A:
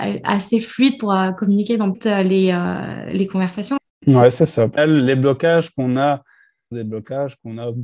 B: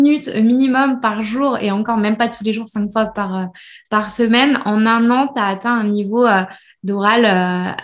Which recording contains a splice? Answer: A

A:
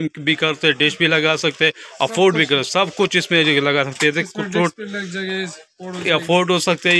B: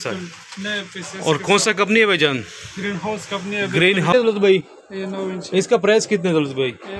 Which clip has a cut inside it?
B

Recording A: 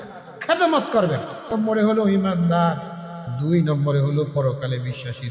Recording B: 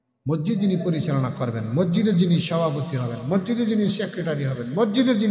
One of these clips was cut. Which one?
A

